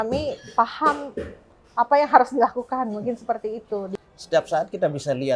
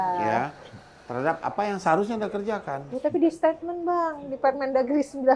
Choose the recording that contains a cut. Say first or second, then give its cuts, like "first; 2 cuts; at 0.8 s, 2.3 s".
first; 1 cut; at 3.9 s